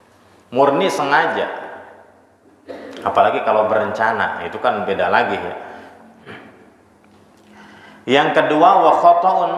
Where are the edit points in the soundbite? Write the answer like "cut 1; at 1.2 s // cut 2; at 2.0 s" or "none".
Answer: cut 1; at 6.4 s